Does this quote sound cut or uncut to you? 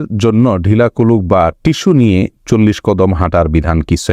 uncut